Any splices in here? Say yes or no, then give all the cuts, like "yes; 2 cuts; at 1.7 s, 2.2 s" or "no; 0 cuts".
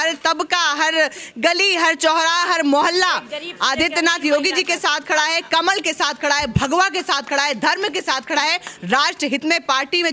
no; 0 cuts